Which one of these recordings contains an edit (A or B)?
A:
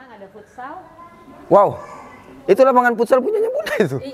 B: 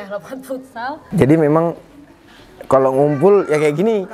B